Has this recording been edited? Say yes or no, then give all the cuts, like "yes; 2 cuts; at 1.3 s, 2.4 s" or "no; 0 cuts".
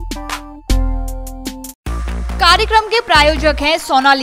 no; 0 cuts